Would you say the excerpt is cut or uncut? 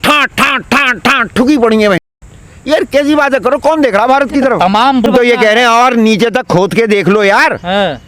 cut